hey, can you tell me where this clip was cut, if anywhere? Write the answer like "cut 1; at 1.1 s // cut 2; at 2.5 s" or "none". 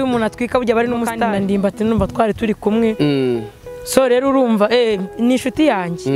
cut 1; at 1.2 s

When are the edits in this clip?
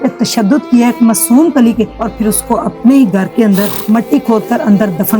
cut 1; at 2.0 s // cut 2; at 3.8 s

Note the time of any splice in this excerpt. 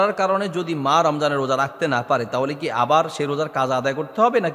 none

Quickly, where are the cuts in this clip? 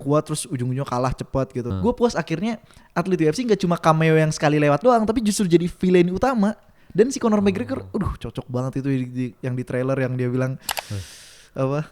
cut 1; at 1.7 s

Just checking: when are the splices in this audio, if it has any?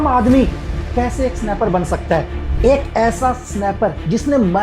cut 1; at 2.4 s

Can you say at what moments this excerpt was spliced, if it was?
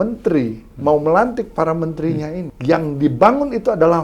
cut 1; at 2.5 s

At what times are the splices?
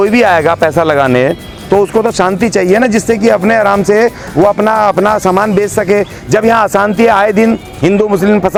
none

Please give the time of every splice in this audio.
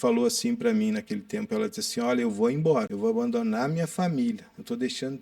cut 1; at 2.9 s

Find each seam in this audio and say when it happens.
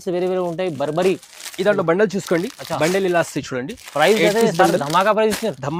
none

